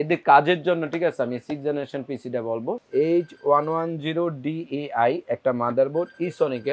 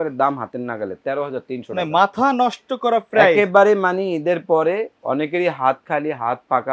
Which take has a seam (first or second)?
first